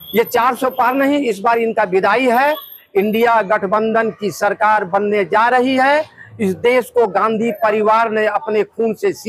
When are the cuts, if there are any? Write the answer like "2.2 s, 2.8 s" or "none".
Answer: none